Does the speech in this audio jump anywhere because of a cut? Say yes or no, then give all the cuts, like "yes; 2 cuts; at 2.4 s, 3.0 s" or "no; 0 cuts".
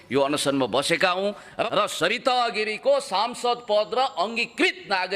yes; 1 cut; at 1.7 s